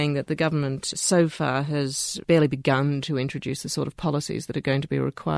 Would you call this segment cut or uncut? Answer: uncut